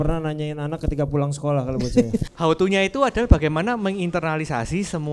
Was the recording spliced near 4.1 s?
no; 1 cut; at 2.3 s

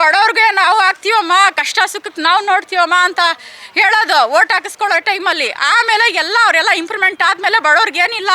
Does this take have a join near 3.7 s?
no; 0 cuts

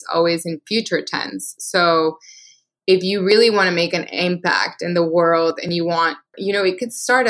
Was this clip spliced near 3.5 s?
no; 1 cut; at 6.4 s

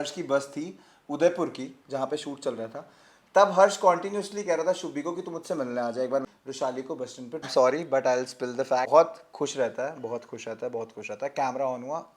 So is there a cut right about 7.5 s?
yes; 3 cuts; at 6.2 s, 7.5 s, 8.9 s

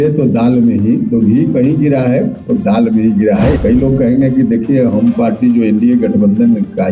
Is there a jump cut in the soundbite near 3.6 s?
yes; 1 cut; at 3.6 s

